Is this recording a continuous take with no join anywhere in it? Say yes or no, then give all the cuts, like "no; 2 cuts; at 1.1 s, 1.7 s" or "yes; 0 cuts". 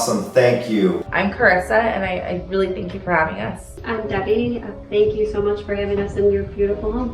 no; 2 cuts; at 1.1 s, 3.7 s